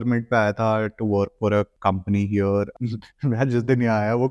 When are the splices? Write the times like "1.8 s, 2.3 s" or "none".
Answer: 2.8 s